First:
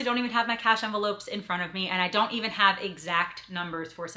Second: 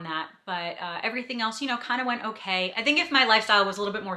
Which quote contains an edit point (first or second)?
second